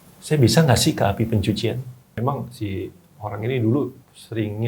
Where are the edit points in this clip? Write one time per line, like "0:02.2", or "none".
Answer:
0:02.0